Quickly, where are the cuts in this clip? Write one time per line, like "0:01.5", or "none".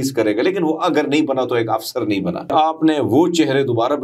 0:02.5